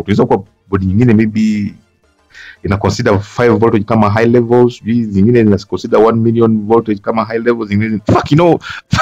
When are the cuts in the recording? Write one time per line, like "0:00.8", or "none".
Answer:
none